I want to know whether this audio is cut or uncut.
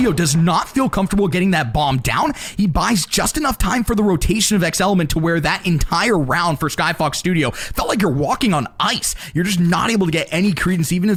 uncut